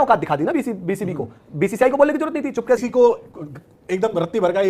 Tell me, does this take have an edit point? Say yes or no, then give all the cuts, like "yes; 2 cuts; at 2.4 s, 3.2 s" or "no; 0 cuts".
yes; 1 cut; at 2.8 s